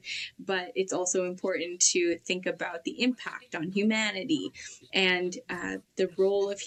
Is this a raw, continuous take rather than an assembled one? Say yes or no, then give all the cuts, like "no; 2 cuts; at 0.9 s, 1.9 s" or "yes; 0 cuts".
yes; 0 cuts